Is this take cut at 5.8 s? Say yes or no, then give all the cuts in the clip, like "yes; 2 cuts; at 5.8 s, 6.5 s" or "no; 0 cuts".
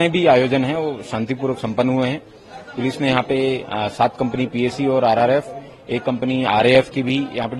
no; 0 cuts